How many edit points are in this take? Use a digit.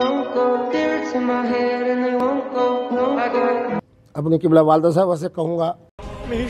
1